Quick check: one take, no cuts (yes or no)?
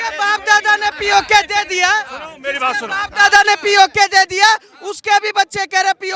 yes